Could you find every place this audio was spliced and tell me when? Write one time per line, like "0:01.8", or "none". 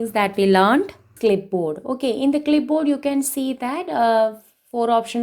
0:01.1

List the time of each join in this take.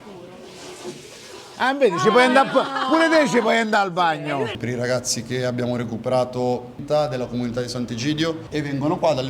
0:04.6
0:06.8
0:08.4

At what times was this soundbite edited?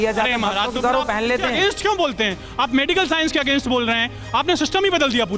none

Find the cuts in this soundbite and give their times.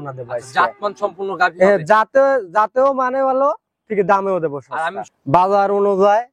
0:05.0

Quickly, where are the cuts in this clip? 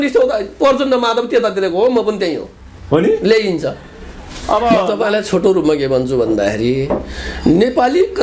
0:04.9

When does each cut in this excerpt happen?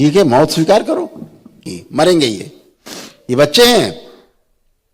0:01.7

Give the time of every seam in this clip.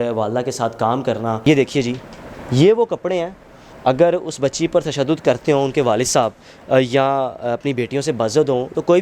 0:01.5

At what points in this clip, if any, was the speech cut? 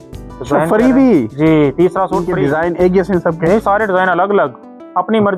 0:02.3

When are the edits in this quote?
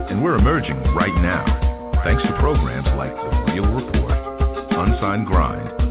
none

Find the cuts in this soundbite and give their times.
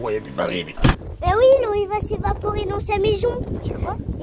0:01.1

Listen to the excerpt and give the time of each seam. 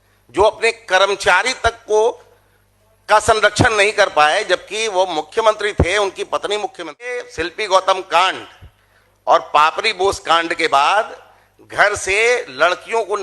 0:07.3

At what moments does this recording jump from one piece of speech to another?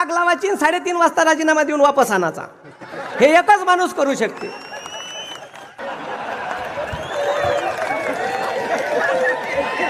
0:05.8

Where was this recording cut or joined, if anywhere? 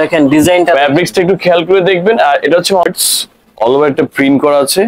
0:02.8

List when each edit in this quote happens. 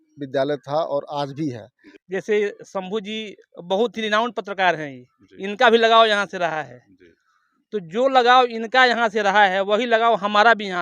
0:02.0

